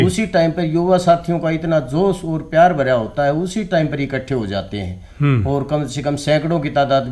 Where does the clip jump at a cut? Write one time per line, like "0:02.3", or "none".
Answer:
none